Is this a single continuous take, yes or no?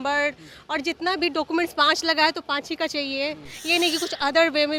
yes